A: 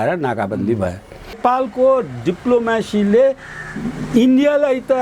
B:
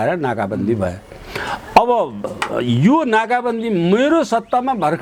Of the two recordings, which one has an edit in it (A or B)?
A